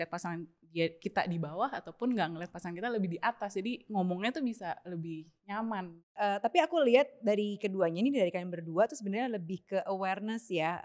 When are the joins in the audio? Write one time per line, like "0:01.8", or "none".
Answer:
0:06.0